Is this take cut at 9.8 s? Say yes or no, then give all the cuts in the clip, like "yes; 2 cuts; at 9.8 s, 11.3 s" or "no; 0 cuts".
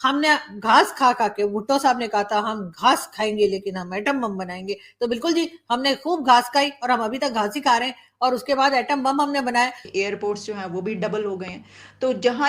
yes; 1 cut; at 9.8 s